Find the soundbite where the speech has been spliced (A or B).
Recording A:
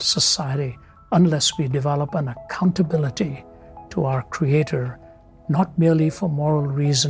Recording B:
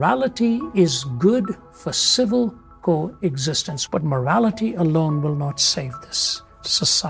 B